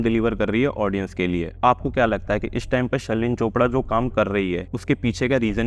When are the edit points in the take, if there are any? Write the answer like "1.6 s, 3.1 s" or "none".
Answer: 1.6 s, 4.7 s